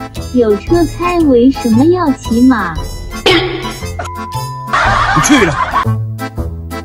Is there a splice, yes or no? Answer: yes